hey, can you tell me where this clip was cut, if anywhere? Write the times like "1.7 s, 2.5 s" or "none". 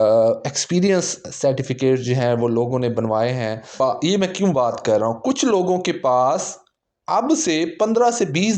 3.8 s